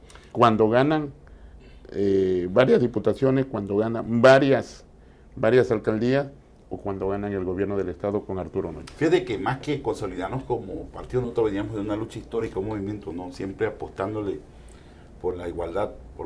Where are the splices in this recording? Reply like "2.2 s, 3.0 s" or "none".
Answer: none